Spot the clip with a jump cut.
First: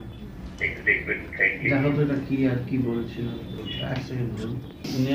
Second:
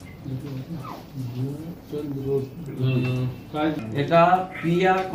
first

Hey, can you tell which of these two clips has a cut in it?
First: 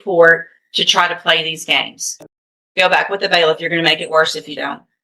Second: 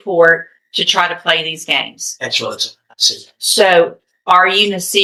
first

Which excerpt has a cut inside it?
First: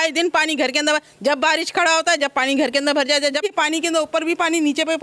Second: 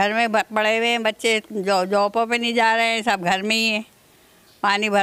first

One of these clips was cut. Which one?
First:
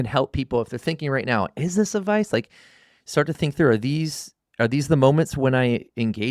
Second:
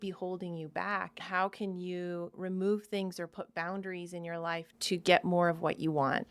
second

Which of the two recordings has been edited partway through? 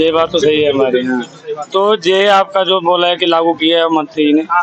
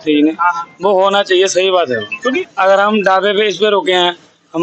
second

